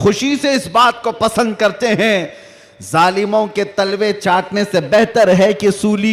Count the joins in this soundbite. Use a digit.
0